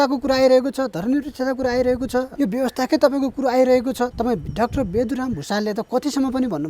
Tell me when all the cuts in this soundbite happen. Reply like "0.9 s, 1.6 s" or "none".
2.3 s, 4.1 s